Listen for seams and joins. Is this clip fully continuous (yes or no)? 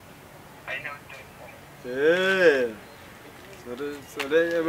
yes